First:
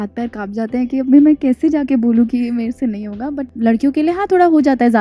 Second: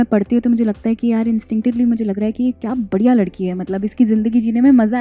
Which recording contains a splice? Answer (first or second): first